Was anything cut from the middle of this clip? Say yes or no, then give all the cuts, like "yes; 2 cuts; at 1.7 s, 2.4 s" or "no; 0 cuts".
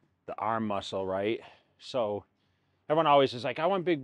no; 0 cuts